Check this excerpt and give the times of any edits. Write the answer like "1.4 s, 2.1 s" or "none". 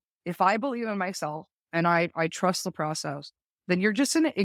none